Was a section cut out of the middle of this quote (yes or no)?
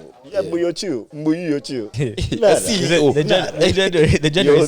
yes